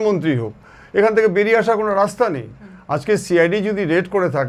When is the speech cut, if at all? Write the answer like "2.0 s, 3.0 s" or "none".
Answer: none